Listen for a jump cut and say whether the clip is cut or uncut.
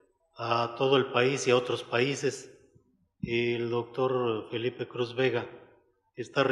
uncut